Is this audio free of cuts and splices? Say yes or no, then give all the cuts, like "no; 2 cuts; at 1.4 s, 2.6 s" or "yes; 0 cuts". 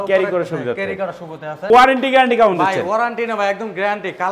no; 1 cut; at 1.7 s